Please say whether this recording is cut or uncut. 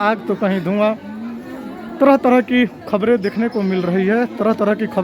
uncut